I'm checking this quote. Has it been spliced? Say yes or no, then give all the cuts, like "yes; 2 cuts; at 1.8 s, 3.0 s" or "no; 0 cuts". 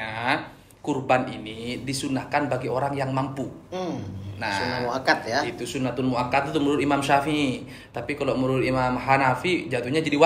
no; 0 cuts